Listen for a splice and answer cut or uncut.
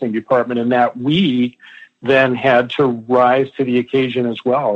uncut